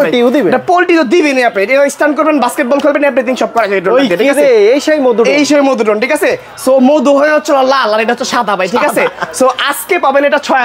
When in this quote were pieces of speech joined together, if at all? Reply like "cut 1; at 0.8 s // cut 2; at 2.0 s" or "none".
none